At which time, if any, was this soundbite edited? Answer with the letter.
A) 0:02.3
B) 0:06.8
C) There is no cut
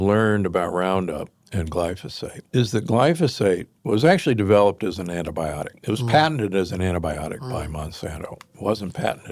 A